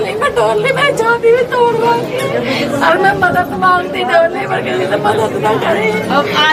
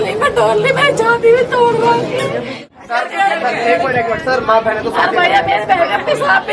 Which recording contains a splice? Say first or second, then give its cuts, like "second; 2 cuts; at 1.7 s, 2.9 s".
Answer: second; 1 cut; at 2.6 s